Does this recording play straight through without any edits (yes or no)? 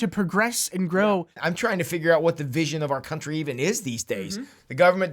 no